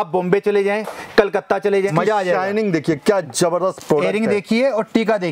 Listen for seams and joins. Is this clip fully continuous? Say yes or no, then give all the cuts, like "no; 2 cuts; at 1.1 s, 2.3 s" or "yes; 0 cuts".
no; 1 cut; at 1.9 s